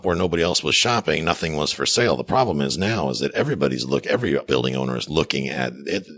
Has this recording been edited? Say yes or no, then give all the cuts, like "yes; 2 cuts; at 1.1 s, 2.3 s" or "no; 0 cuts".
yes; 1 cut; at 4.4 s